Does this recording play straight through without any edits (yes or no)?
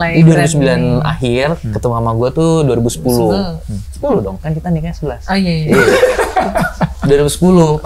yes